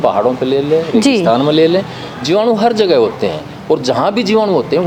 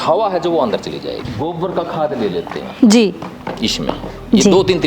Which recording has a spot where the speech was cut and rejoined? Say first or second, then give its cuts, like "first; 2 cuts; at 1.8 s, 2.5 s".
second; 1 cut; at 1.2 s